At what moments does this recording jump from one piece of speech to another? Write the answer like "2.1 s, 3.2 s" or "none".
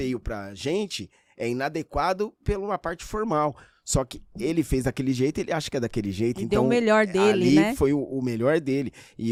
none